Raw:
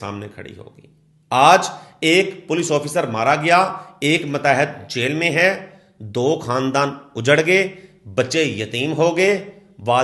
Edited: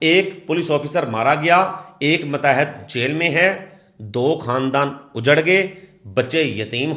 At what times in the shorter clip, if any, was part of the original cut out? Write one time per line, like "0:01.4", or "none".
none